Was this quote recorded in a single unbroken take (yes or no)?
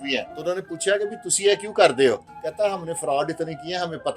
no